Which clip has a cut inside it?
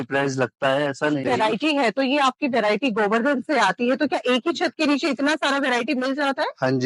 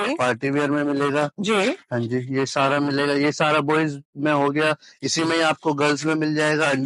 first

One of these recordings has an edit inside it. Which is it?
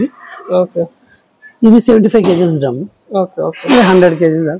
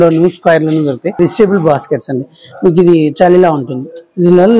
second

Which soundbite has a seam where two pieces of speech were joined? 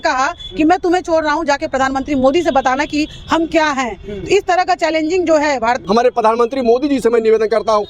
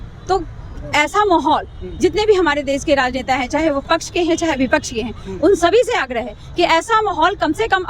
first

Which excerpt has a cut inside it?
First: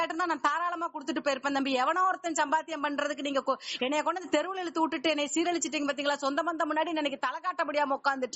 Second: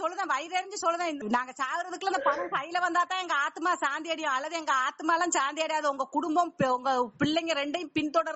second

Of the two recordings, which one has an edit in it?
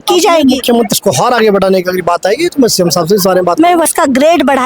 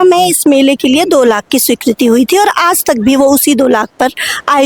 first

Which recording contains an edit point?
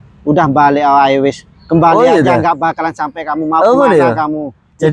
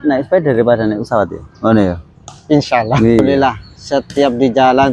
second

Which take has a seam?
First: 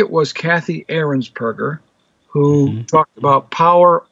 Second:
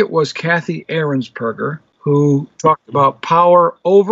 second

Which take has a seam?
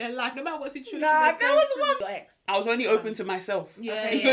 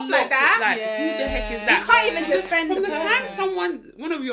first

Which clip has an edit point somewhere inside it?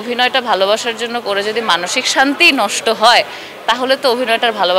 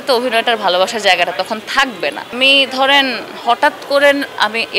second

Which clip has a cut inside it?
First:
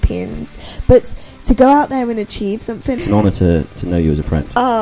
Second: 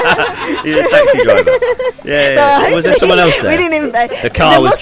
first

